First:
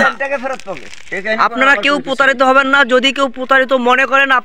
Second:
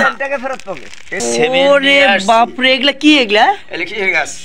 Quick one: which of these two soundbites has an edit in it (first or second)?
second